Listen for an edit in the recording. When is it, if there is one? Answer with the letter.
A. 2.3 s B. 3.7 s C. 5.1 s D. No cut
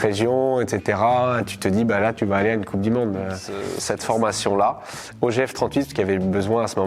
B